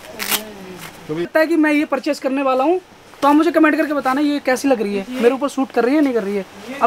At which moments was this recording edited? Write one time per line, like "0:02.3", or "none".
0:01.3